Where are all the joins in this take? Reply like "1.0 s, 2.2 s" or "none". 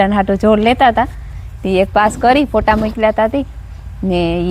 none